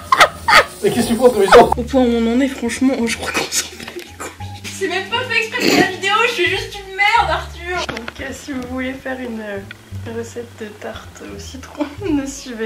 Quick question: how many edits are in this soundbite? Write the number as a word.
three